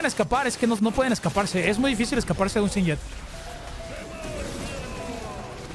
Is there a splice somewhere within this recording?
no; 0 cuts

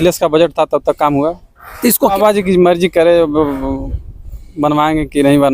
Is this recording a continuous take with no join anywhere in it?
no; 1 cut; at 2.1 s

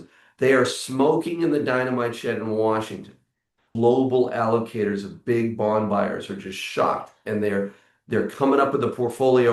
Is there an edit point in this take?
yes; 1 cut; at 3.7 s

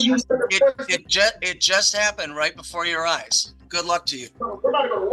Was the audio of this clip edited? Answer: yes; 1 cut; at 3.6 s

